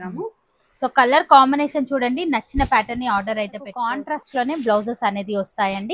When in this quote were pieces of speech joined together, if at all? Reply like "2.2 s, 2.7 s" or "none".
3.9 s